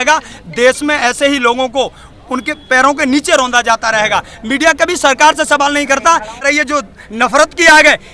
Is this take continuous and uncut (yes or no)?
no